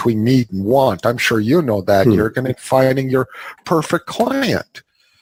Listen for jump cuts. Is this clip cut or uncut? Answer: uncut